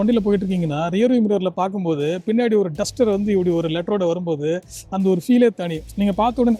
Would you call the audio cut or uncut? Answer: uncut